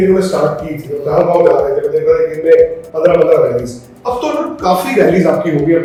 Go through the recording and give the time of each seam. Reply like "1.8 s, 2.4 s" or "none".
none